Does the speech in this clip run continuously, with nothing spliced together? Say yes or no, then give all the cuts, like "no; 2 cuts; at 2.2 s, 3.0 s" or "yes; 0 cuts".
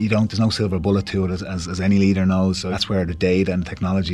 no; 1 cut; at 2.7 s